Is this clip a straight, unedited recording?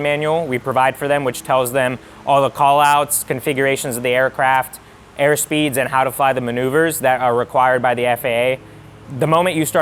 yes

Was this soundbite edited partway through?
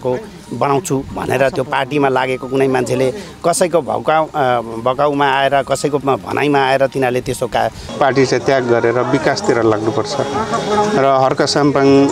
yes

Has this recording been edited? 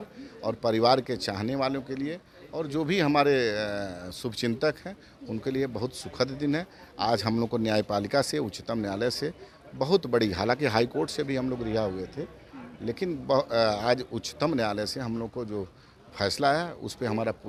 no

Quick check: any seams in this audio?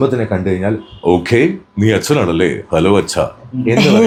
no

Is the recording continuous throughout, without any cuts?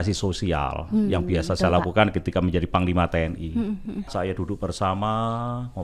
no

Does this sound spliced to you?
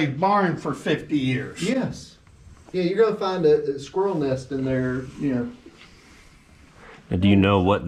no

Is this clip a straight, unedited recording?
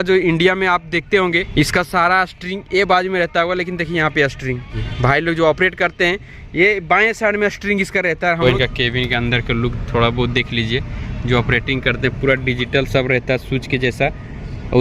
no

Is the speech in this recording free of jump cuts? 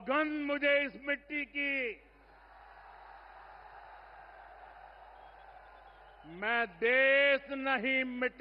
yes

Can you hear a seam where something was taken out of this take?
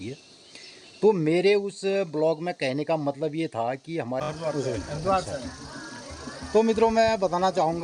yes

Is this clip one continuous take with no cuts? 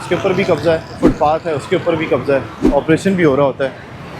no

